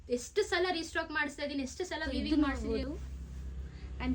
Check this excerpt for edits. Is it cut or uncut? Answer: cut